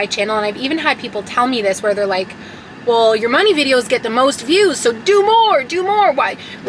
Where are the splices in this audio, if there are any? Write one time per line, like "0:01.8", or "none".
none